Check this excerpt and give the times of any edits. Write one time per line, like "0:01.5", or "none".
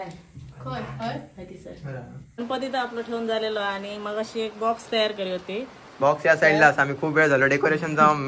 0:02.2